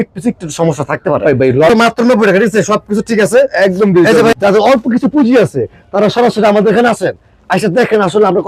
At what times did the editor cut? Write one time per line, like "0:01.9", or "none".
0:01.7
0:04.3